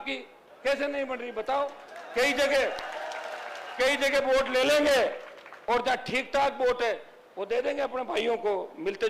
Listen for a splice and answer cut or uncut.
uncut